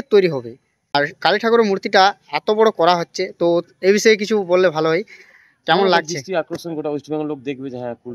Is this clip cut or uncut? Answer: cut